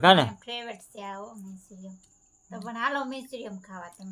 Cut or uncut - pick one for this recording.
uncut